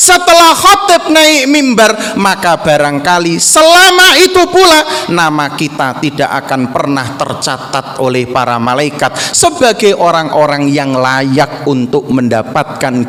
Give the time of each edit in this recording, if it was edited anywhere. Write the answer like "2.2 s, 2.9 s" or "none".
none